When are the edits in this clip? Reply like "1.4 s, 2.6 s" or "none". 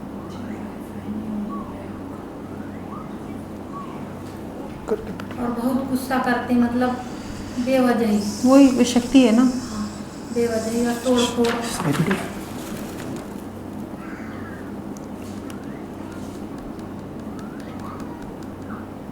4.7 s